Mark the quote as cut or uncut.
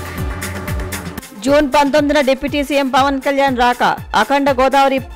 cut